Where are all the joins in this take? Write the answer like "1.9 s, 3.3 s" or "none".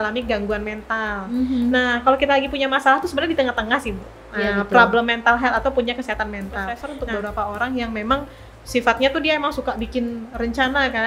6.8 s

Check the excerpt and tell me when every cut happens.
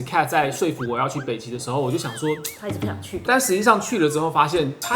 3.1 s

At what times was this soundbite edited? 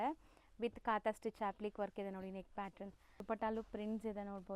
3.2 s

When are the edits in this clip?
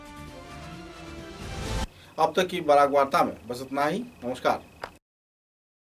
none

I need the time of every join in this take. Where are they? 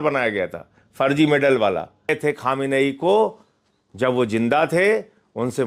2.1 s

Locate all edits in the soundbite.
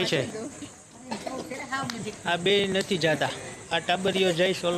none

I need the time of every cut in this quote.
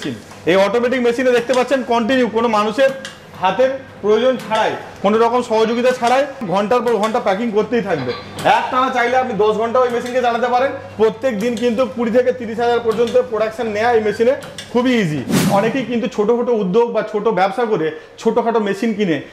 6.4 s, 15.5 s

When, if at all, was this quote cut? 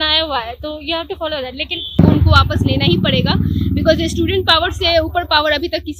2.0 s

